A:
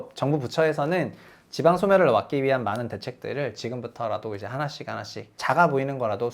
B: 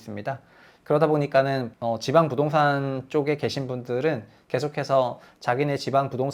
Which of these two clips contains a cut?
A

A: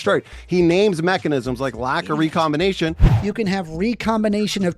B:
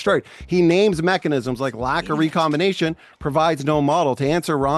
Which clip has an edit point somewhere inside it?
A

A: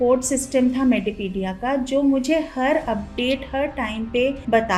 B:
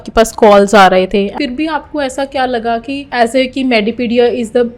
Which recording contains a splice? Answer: B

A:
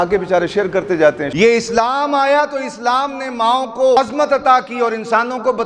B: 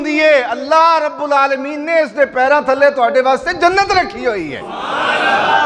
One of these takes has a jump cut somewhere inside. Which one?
A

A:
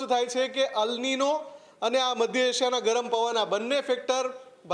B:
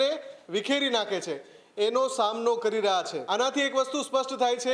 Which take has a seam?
B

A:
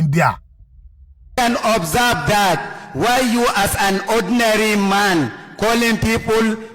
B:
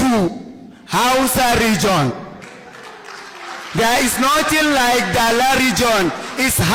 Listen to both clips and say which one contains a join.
A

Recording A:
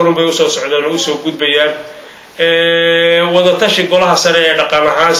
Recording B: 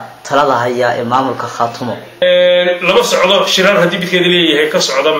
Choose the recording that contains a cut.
B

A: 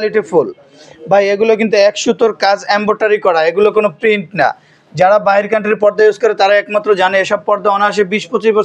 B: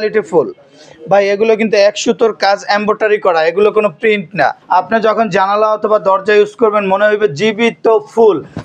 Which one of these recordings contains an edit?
B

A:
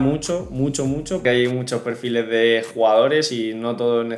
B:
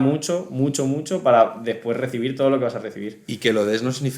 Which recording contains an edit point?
A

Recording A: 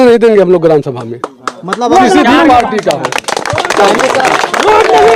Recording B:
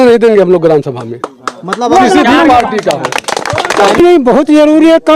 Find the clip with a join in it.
B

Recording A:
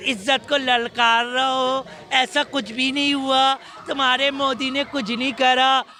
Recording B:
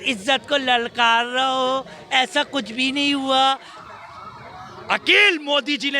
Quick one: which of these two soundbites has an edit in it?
B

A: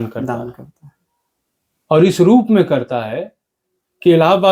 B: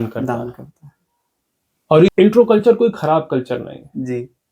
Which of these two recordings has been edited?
B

